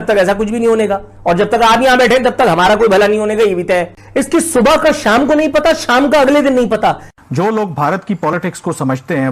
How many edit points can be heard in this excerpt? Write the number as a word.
two